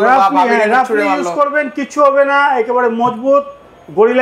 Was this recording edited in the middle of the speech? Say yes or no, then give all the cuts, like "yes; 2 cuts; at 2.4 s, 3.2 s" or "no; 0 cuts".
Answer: no; 0 cuts